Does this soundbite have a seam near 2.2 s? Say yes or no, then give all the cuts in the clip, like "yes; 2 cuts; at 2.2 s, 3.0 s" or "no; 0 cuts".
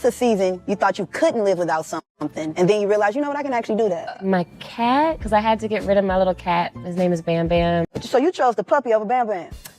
no; 2 cuts; at 4.2 s, 8.0 s